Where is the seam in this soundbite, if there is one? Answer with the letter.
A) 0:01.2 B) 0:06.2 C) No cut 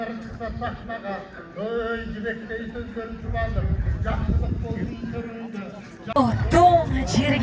B